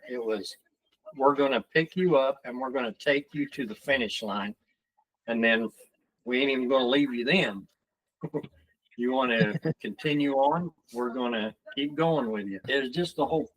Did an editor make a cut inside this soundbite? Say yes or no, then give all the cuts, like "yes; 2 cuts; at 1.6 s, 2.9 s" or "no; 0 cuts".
yes; 1 cut; at 12.6 s